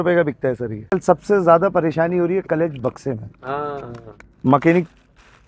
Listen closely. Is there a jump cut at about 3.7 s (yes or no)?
no